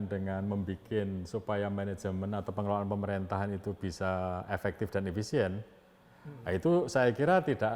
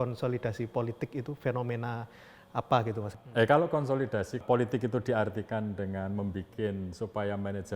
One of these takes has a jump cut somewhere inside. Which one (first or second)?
second